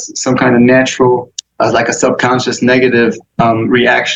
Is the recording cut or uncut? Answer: cut